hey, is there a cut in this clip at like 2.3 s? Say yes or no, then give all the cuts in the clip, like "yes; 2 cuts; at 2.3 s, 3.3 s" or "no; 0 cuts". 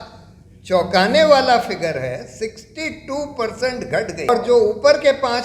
no; 1 cut; at 4.3 s